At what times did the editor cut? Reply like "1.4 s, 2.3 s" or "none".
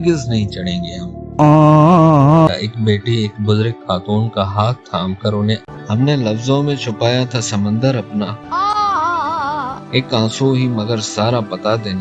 2.5 s, 5.6 s